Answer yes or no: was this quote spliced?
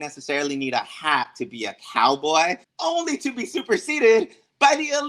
yes